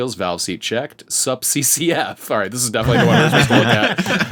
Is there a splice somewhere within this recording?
no; 0 cuts

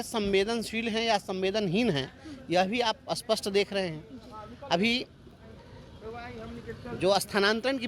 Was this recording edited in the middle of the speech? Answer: no; 0 cuts

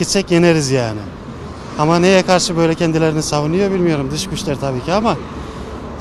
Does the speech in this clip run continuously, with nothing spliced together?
yes; 0 cuts

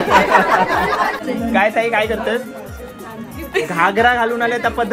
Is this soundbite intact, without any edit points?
no; 1 cut; at 1.2 s

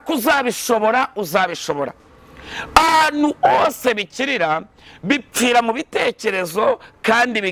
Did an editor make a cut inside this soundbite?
no; 0 cuts

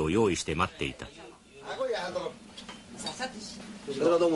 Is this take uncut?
yes; 0 cuts

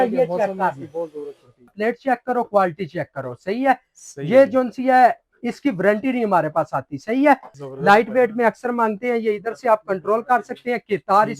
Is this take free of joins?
no; 2 cuts; at 1.7 s, 7.6 s

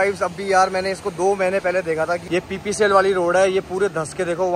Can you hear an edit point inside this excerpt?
yes; 1 cut; at 2.2 s

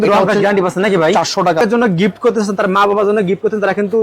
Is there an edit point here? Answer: yes; 1 cut; at 1.6 s

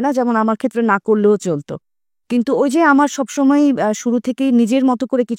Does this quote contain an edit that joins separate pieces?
no; 0 cuts

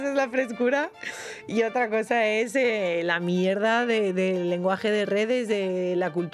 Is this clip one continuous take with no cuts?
yes; 0 cuts

